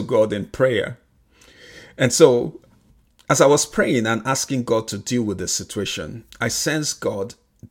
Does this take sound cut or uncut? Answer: uncut